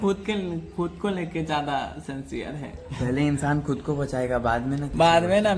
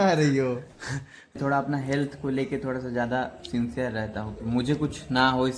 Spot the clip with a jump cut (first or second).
second